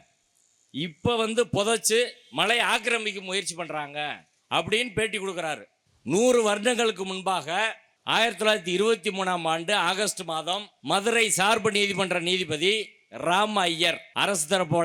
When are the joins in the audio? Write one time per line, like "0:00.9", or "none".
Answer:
0:04.3